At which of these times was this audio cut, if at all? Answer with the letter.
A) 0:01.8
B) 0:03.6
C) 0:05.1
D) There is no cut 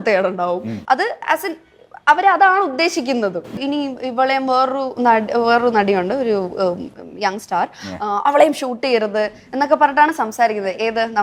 B